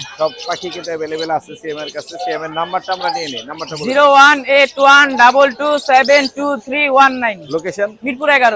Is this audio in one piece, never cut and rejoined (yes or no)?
yes